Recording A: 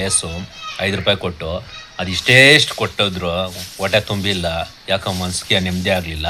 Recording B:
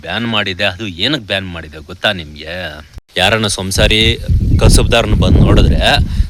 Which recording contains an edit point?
B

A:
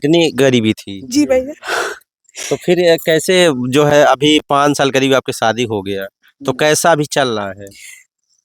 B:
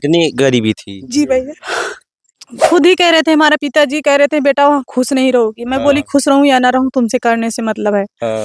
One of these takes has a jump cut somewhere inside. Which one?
B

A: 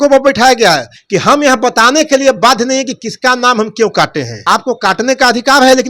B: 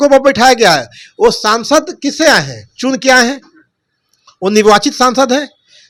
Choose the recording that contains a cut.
A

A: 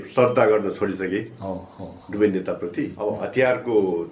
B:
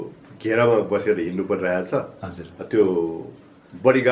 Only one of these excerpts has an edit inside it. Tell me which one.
A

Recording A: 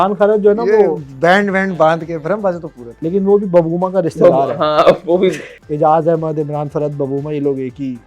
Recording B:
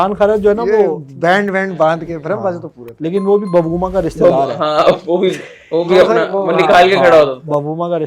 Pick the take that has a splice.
A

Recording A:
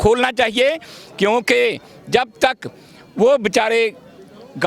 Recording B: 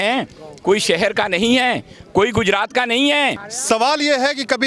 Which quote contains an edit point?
B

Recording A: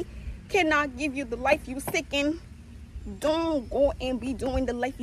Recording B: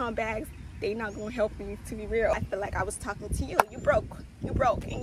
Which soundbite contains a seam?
B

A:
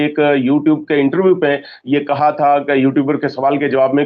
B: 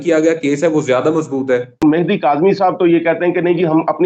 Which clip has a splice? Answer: B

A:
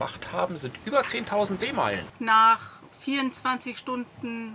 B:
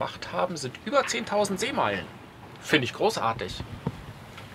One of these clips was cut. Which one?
A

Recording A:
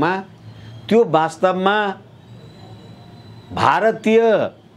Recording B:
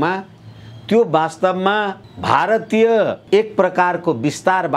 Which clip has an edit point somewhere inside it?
B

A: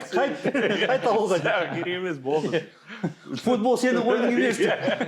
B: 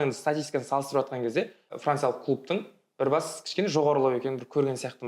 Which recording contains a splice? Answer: B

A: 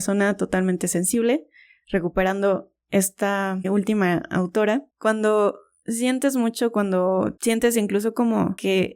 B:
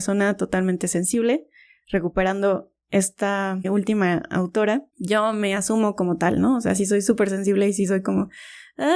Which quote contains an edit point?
A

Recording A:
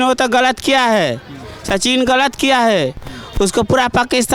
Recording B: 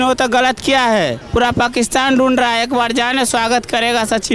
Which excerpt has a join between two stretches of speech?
B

